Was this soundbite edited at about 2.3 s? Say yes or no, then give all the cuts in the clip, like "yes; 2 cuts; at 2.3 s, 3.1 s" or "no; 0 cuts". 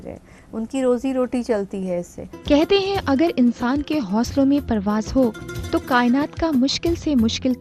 yes; 1 cut; at 2.3 s